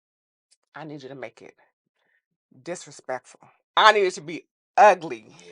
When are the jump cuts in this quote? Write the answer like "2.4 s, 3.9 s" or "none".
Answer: 3.8 s